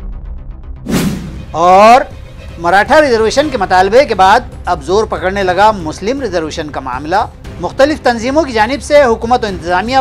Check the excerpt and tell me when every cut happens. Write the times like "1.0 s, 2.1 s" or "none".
none